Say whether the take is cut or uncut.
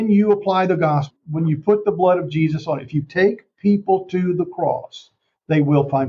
cut